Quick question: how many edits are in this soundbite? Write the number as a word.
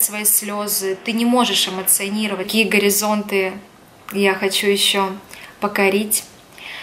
one